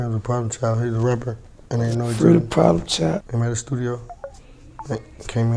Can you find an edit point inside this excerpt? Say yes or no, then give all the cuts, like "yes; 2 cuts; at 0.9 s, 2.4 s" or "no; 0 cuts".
yes; 1 cut; at 3.3 s